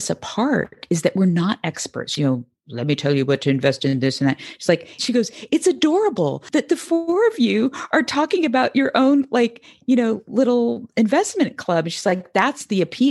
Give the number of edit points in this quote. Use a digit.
3